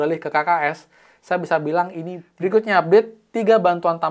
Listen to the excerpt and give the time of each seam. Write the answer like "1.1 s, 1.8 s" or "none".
2.2 s